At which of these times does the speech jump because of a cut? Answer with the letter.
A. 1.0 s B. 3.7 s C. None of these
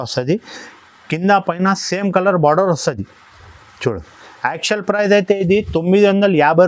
C